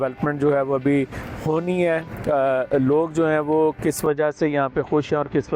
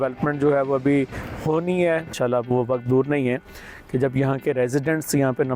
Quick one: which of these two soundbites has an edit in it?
second; 1 cut; at 2.1 s

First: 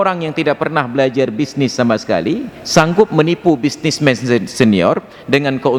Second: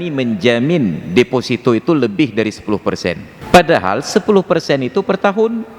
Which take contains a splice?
second; 1 cut; at 3.3 s

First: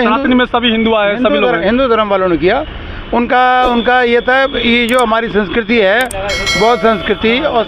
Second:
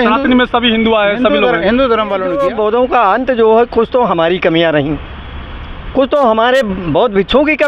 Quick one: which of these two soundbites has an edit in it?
second; 1 cut; at 2.3 s

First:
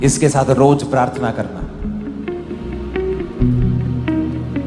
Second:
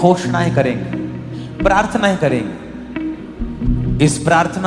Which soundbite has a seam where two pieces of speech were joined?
second; 2 cuts; at 1.4 s, 3.6 s

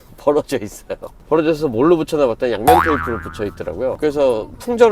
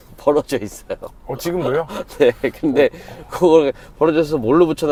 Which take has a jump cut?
first; 1 cut; at 1.1 s

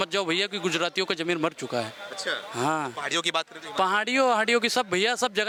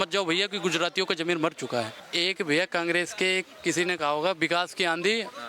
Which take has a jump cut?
second; 1 cut; at 2.0 s

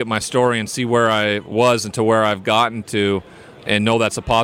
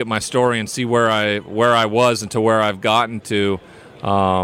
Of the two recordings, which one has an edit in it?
first; 2 cuts; at 1.5 s, 3.5 s

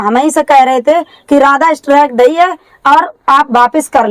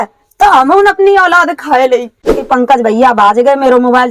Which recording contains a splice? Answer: second; 1 cut; at 2.4 s

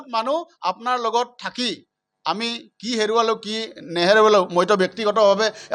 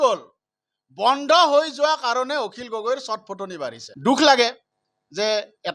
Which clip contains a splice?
second; 1 cut; at 3.9 s

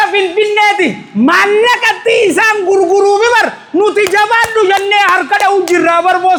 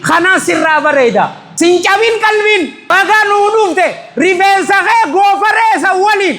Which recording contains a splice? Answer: second; 2 cuts; at 1.4 s, 2.9 s

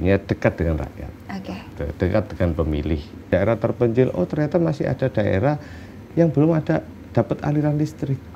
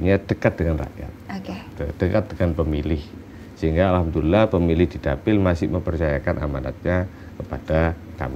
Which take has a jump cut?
first; 1 cut; at 3.2 s

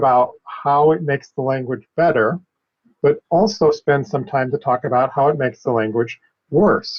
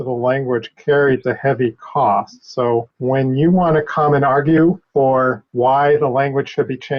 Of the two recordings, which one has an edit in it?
second; 2 cuts; at 2.9 s, 5.2 s

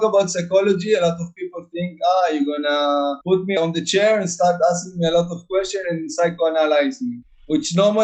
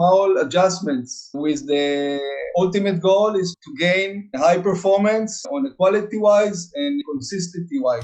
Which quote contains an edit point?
second; 3 cuts; at 1.3 s, 5.4 s, 7.0 s

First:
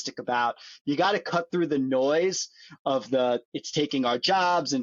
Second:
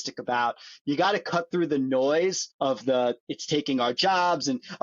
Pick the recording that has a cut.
second; 1 cut; at 2.5 s

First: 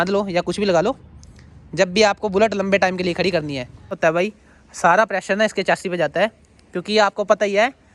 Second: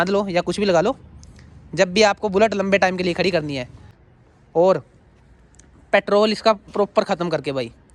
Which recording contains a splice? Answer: first; 1 cut; at 3.9 s

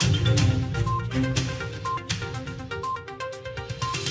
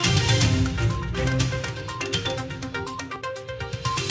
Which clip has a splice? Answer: second; 1 cut; at 3.2 s

